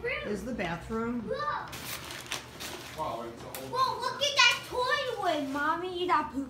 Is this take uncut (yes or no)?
no